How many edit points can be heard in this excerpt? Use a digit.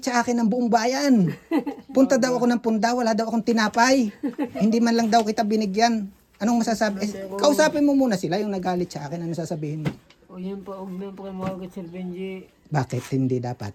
0